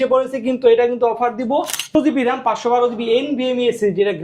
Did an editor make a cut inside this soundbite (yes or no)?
yes